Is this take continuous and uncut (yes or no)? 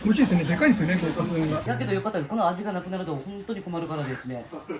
no